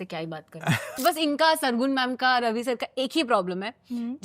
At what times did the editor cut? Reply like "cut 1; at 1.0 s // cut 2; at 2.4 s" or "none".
cut 1; at 0.9 s